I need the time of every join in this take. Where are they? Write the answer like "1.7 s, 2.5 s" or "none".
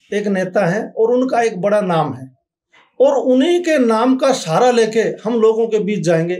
none

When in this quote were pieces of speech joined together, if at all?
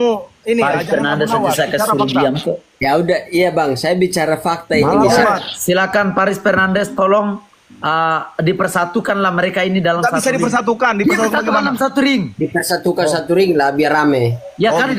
4.8 s

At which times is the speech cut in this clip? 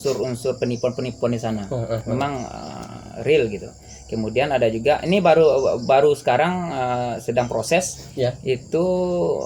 none

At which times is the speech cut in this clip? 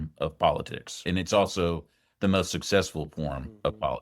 1.1 s

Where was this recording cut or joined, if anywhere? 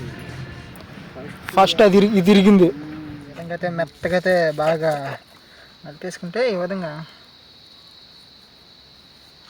3.4 s

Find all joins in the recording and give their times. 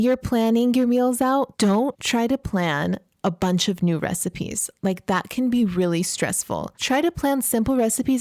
1.6 s, 6.7 s

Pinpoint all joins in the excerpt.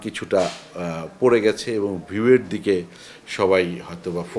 none

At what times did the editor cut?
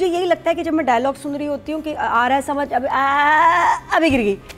none

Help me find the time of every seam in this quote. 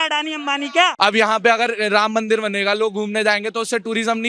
0.9 s

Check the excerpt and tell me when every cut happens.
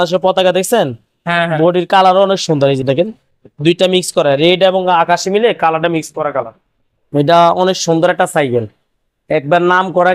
none

